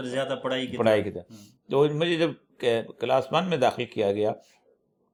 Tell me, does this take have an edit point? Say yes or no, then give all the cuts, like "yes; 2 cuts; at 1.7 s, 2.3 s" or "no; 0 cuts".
no; 0 cuts